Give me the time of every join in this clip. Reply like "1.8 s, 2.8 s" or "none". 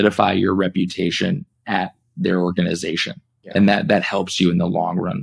none